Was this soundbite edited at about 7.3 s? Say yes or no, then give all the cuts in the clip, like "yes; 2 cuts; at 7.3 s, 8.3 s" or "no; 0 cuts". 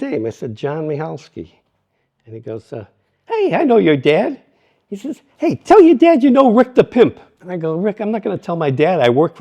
yes; 1 cut; at 7.3 s